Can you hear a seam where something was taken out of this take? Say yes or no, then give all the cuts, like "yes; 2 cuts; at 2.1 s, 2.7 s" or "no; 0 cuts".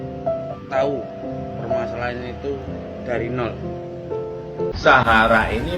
yes; 1 cut; at 4.7 s